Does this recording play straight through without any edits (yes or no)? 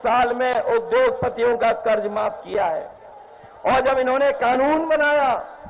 yes